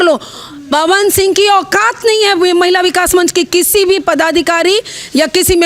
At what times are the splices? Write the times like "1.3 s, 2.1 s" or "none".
none